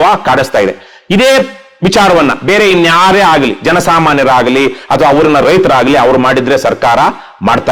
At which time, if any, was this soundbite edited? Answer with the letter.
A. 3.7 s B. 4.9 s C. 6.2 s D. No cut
D